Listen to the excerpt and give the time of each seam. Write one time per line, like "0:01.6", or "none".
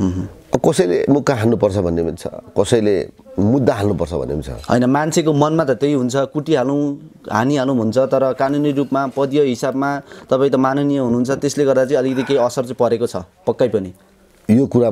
none

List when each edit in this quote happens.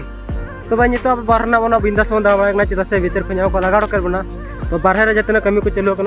none

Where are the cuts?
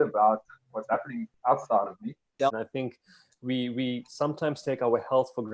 0:02.4

